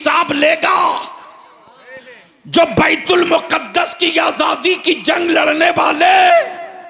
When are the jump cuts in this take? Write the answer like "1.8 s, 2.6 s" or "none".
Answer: none